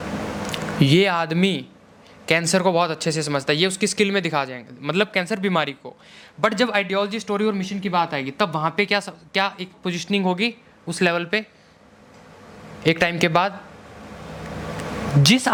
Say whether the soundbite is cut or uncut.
uncut